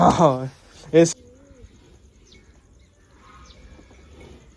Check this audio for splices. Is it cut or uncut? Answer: cut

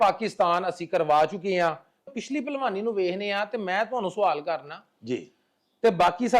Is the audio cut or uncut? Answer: cut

